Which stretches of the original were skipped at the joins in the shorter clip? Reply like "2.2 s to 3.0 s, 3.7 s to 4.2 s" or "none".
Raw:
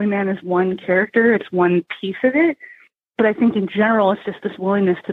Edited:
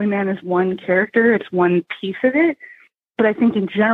none